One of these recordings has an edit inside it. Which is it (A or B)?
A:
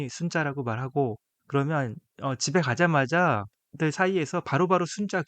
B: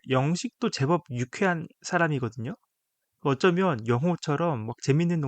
A